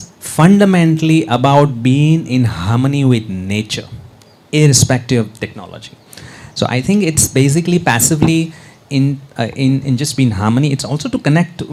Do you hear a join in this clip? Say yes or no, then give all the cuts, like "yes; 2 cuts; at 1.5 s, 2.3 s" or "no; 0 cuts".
no; 0 cuts